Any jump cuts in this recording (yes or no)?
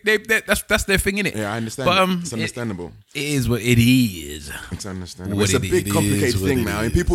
no